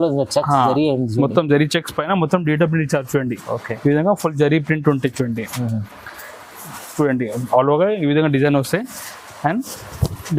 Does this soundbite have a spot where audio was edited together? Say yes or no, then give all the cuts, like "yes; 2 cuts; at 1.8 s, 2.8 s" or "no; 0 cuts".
no; 0 cuts